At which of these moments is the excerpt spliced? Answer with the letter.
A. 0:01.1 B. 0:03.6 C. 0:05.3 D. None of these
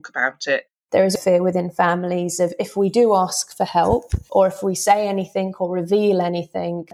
A